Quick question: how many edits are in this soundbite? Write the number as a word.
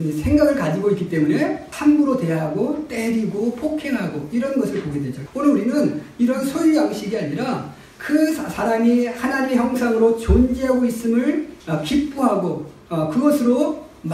three